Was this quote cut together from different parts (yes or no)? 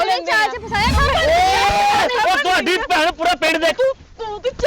yes